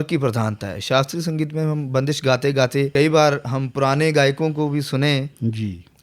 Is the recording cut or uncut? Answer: cut